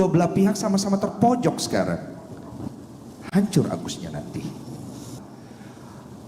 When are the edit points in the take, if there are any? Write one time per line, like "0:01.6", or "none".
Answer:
0:05.1